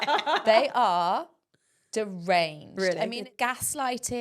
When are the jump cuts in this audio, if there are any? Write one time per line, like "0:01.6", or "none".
0:03.2